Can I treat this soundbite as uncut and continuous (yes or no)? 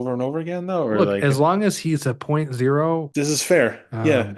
no